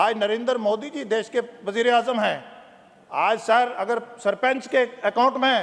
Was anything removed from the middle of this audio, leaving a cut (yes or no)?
no